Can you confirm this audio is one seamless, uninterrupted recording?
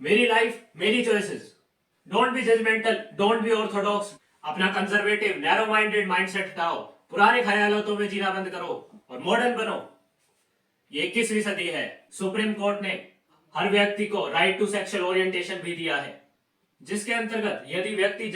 no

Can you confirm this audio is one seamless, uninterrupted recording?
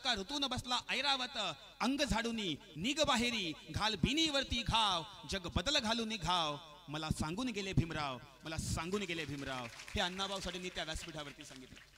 yes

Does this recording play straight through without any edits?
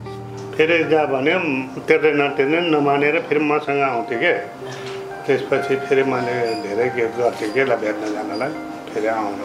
yes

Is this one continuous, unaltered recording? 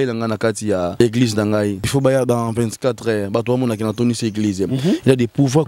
no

